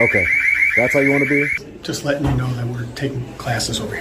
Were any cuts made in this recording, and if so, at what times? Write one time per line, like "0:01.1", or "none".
0:01.6